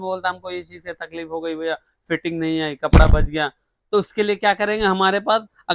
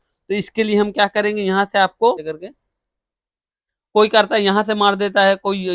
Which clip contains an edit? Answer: second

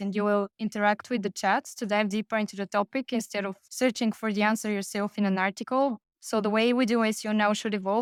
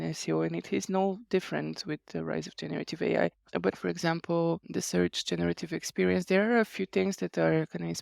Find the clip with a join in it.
second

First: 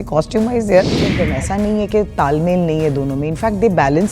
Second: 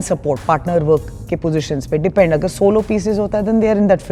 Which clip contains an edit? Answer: first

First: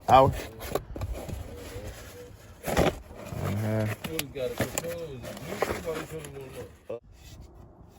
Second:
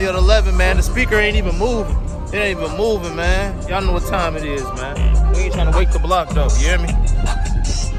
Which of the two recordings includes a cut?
first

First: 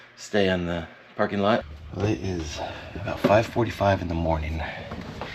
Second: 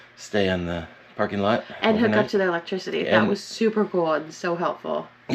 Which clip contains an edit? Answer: first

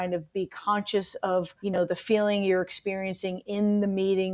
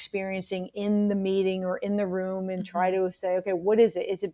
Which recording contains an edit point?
first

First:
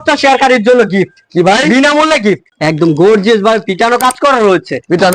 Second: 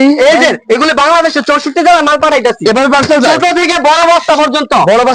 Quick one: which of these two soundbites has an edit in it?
first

